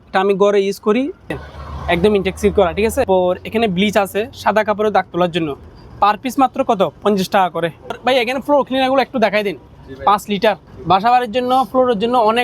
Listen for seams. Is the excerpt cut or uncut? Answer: cut